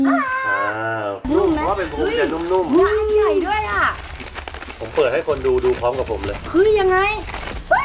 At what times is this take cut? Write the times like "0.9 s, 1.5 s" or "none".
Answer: 1.3 s